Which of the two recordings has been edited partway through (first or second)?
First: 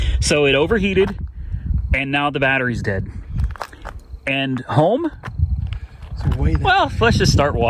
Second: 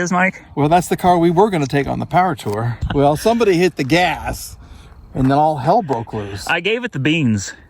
second